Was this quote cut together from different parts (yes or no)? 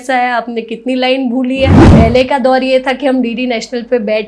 yes